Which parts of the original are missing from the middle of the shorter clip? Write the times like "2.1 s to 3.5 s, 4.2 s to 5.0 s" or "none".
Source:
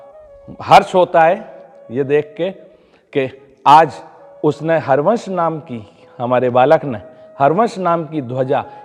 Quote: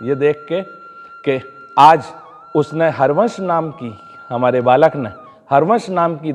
none